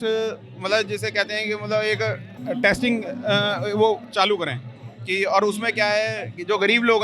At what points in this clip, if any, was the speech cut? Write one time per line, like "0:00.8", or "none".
0:02.3